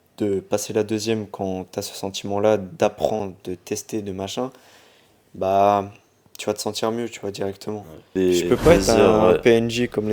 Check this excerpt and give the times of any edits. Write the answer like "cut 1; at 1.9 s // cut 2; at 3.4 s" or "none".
cut 1; at 8.1 s